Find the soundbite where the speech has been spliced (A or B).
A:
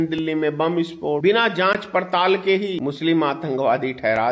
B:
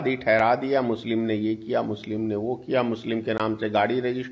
A